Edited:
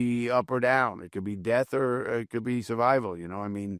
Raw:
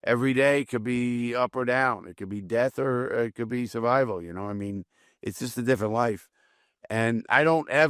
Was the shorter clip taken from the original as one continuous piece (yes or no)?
yes